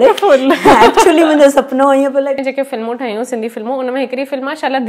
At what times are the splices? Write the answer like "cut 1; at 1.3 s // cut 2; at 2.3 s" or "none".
cut 1; at 2.4 s